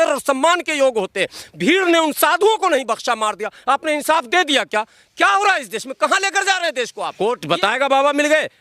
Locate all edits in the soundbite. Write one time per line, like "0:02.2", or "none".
0:07.0